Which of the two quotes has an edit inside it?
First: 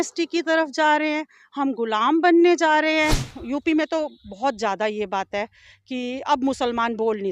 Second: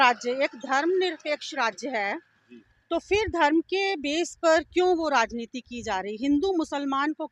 first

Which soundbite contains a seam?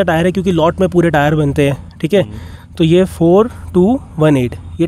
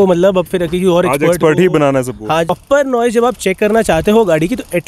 second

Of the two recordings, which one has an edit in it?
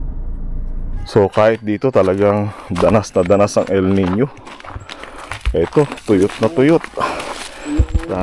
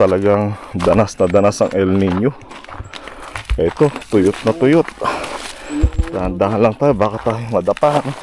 first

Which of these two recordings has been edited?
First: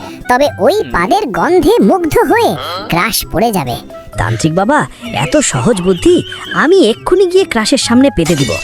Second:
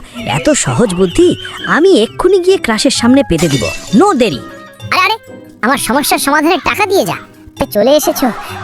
second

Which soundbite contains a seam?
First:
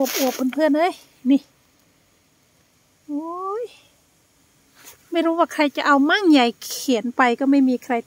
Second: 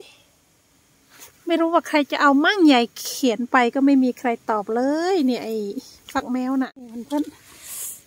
second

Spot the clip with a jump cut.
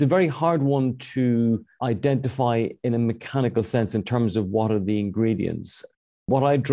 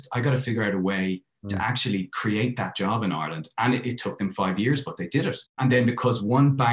second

